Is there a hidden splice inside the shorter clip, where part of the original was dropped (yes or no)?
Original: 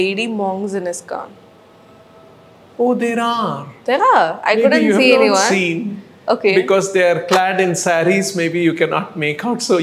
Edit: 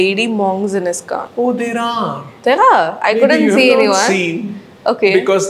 yes